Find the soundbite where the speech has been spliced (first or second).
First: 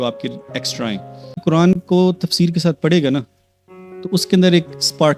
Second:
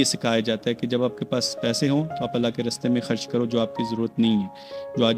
first